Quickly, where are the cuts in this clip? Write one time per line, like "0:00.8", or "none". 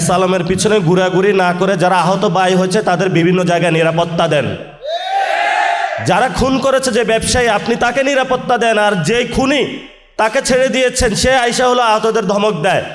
none